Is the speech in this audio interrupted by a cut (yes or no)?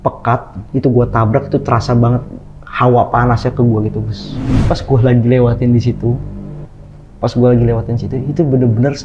yes